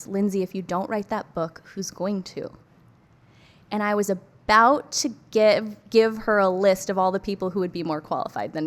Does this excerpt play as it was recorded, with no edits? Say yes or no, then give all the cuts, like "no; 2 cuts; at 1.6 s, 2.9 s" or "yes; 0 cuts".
yes; 0 cuts